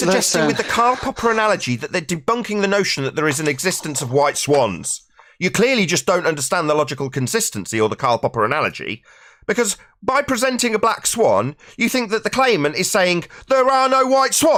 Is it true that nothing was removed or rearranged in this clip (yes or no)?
yes